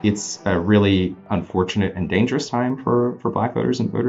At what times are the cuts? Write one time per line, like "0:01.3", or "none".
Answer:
0:01.2